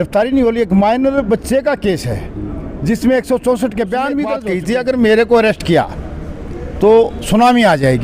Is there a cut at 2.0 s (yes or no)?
no